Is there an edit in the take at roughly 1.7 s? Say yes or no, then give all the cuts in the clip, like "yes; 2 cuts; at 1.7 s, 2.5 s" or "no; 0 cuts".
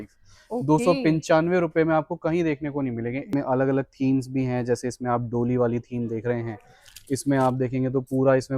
no; 1 cut; at 3.3 s